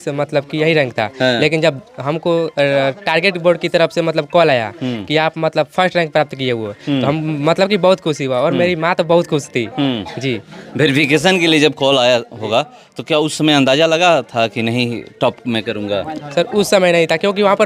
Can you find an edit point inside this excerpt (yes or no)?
no